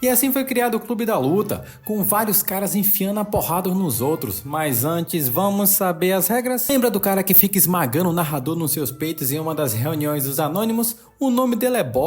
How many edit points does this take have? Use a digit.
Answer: 1